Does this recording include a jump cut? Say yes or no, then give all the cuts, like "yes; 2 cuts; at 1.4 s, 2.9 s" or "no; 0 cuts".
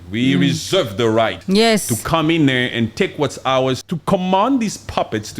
yes; 2 cuts; at 1.4 s, 3.8 s